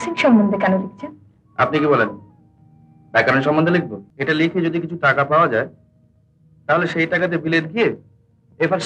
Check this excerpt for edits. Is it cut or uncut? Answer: cut